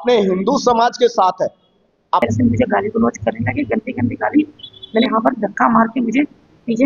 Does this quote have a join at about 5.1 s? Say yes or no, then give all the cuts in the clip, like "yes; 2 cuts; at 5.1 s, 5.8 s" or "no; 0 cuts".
yes; 2 cuts; at 2.2 s, 5.1 s